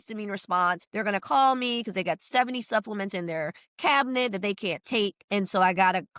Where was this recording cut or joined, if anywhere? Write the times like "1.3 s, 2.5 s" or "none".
0.9 s, 5.2 s